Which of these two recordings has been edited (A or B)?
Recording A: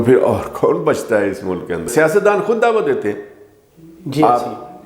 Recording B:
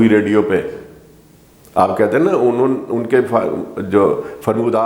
A